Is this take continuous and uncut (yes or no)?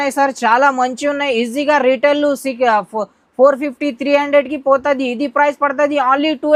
yes